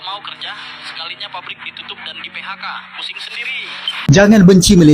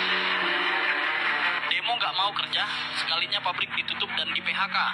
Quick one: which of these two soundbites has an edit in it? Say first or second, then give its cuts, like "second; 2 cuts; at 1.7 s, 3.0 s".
first; 1 cut; at 4.0 s